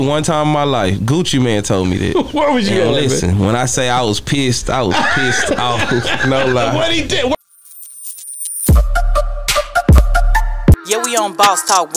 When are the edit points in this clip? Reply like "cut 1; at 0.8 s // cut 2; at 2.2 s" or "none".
cut 1; at 7.3 s

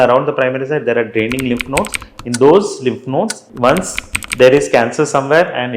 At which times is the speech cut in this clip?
cut 1; at 3.4 s

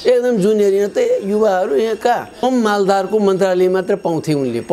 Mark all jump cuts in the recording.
cut 1; at 2.4 s

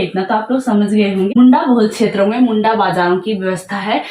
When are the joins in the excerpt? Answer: cut 1; at 1.3 s

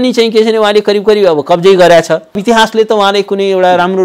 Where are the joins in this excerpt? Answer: cut 1; at 2.4 s

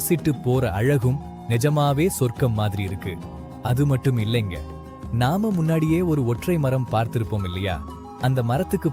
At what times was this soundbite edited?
none

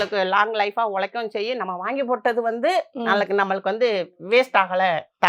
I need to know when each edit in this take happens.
none

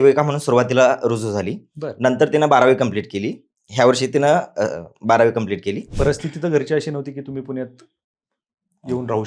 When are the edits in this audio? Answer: cut 1; at 5.9 s

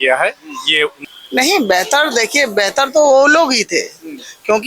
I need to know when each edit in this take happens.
cut 1; at 1.0 s

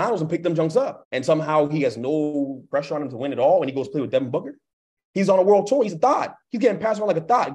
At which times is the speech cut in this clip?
cut 1; at 1.1 s

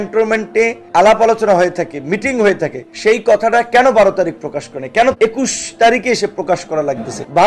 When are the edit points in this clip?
none

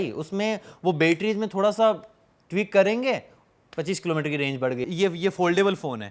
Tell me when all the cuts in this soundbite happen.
cut 1; at 4.8 s

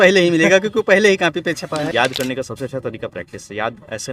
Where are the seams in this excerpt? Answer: cut 1; at 1.9 s

